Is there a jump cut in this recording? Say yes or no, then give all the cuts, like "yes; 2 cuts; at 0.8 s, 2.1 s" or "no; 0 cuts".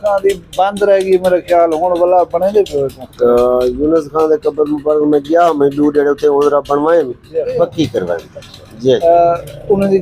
yes; 3 cuts; at 3.0 s, 7.5 s, 9.0 s